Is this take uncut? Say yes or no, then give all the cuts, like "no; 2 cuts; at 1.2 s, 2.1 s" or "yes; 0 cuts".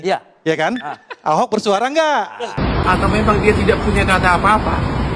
no; 1 cut; at 2.5 s